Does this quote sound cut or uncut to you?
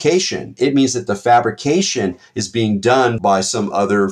cut